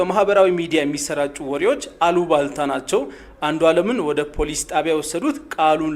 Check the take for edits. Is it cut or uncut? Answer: uncut